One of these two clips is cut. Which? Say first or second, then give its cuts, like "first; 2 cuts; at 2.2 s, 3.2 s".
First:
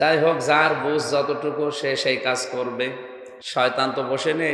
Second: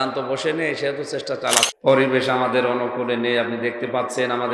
second; 1 cut; at 1.7 s